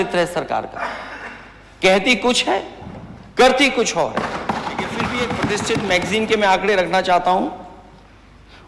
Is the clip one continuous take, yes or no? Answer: no